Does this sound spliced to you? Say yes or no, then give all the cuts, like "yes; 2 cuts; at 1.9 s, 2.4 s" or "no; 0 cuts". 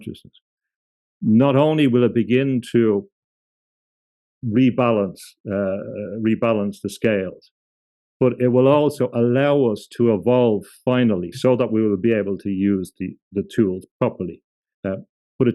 no; 0 cuts